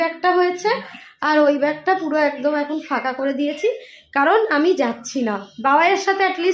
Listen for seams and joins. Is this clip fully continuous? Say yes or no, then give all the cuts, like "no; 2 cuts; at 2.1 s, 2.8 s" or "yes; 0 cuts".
yes; 0 cuts